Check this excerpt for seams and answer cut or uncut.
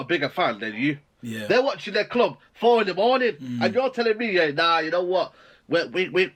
uncut